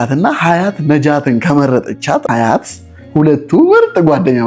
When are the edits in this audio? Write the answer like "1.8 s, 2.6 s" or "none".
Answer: 2.2 s